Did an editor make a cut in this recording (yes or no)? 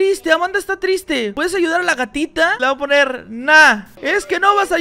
yes